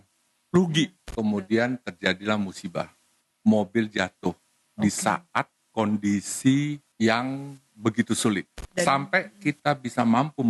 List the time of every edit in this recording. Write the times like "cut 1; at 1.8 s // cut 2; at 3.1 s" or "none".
cut 1; at 1.0 s // cut 2; at 3.2 s // cut 3; at 6.8 s // cut 4; at 8.6 s